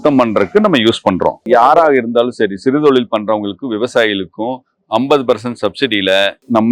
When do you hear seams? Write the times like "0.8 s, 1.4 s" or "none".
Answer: 1.4 s